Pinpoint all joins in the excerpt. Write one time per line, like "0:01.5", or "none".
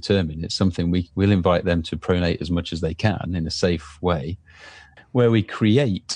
0:04.9

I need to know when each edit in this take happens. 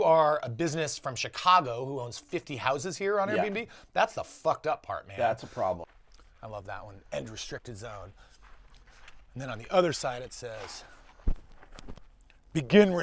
0:05.8

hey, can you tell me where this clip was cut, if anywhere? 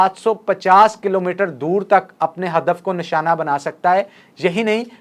none

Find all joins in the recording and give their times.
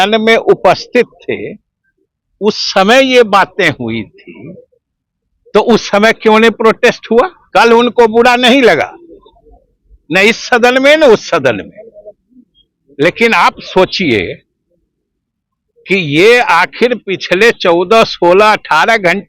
0:07.4

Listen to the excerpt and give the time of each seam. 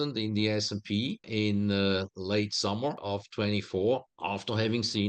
0:01.3
0:03.0
0:04.1

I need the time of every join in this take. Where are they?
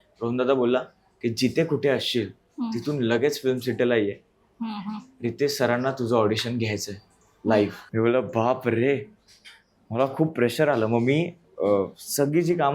0:07.8

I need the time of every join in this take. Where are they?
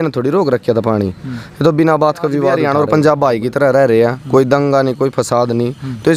0:02.6

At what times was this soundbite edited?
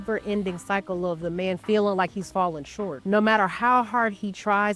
0:03.2

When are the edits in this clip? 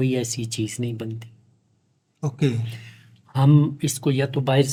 none

